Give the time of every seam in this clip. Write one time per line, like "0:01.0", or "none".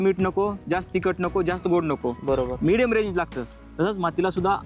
none